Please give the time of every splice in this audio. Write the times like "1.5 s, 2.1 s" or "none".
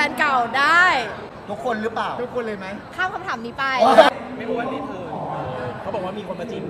4.1 s